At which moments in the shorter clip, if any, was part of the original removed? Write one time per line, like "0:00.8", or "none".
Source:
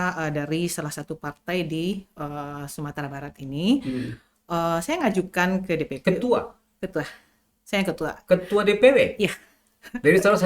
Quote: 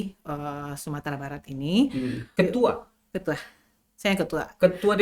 0:02.3